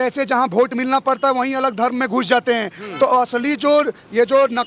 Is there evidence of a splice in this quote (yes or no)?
no